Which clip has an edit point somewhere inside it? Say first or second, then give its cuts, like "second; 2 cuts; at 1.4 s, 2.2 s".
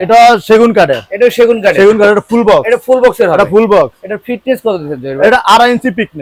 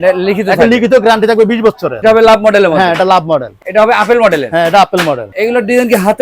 second; 3 cuts; at 2.0 s, 3.5 s, 5.3 s